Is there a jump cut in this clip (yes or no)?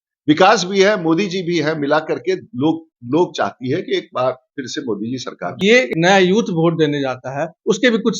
yes